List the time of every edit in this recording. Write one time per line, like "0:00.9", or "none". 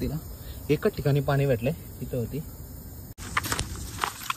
0:03.2